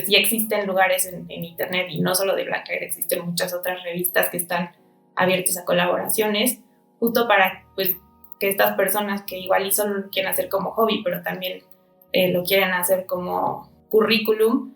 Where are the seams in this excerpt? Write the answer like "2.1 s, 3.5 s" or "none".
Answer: 13.7 s